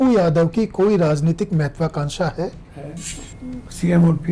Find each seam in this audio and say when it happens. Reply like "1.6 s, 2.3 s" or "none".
none